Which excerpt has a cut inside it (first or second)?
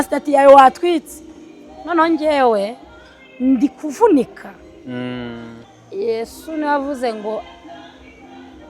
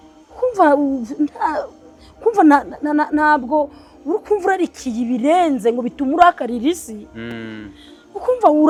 first